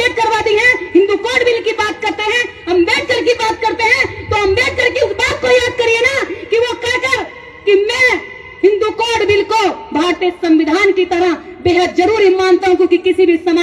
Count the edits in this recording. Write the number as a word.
zero